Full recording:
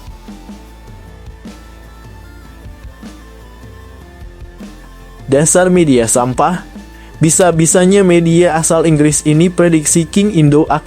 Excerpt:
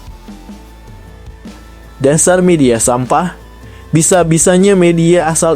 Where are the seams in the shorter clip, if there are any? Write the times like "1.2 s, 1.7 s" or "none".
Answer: 1.9 s